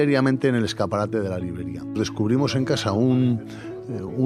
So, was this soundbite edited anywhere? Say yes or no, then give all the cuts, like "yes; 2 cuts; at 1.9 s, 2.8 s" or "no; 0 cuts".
yes; 1 cut; at 2.0 s